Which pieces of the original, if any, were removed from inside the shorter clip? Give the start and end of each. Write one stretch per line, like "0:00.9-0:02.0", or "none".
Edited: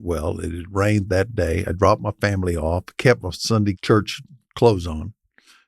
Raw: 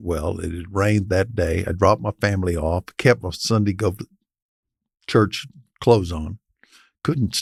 0:03.8-0:05.0